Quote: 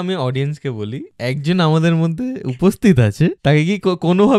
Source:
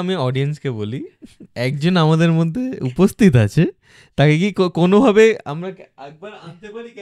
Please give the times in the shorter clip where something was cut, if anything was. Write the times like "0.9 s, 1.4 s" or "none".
1.1 s, 3.4 s